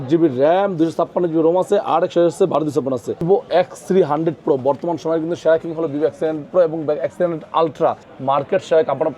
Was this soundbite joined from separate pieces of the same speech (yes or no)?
yes